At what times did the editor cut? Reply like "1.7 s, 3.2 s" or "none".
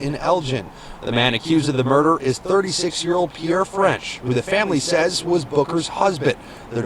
3.4 s